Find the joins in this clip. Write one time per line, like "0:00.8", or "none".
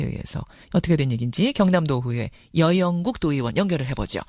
0:02.9